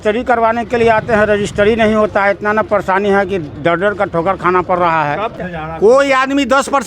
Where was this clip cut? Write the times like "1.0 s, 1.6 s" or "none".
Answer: 5.3 s